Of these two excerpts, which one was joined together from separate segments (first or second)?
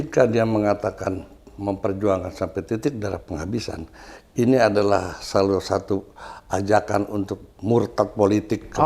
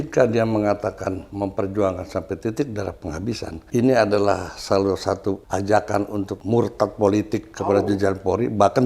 second